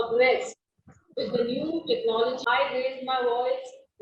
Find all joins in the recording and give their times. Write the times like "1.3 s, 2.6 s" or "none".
2.4 s